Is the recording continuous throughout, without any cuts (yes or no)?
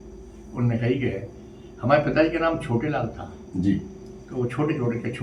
yes